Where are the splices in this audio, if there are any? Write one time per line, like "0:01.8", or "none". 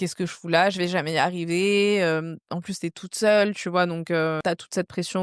none